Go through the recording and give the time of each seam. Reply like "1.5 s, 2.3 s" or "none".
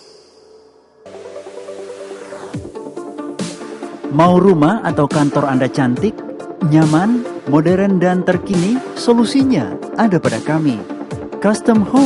1.0 s